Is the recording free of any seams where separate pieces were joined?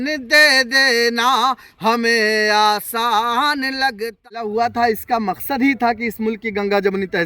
no; 1 cut; at 4.3 s

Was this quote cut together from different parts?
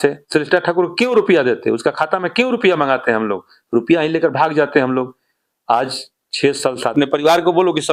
yes; 1 cut; at 6.9 s

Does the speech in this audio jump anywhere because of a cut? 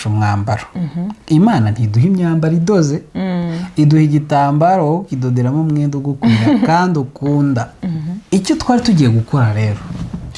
yes; 1 cut; at 8.1 s

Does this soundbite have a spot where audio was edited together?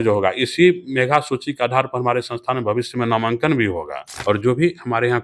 yes; 1 cut; at 4.1 s

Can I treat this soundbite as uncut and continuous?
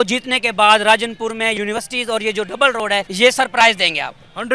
no; 2 cuts; at 1.5 s, 3.1 s

